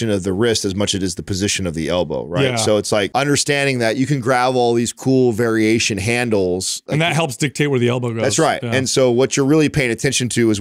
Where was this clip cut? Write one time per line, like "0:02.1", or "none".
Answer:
0:03.1
0:06.8